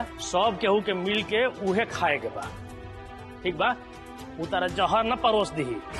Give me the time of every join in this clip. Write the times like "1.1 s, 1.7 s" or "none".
none